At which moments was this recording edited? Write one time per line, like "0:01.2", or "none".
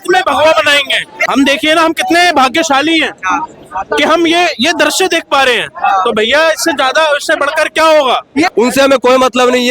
0:01.2
0:08.5

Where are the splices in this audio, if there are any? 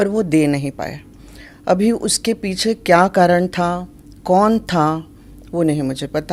none

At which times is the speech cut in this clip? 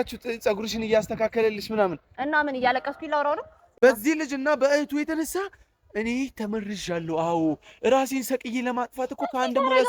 0:03.8

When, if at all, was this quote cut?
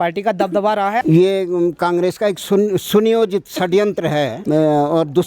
0:01.0
0:04.4

